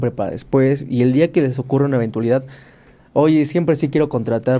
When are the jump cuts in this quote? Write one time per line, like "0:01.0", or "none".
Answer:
none